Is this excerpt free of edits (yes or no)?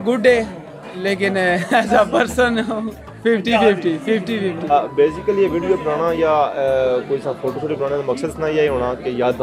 no